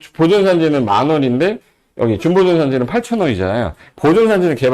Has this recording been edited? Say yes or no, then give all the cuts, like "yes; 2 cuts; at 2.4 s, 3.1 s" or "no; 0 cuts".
yes; 1 cut; at 3.8 s